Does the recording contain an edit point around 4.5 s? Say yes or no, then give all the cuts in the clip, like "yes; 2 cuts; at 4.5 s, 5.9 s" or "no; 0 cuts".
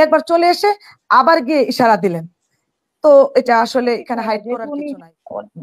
yes; 1 cut; at 4.5 s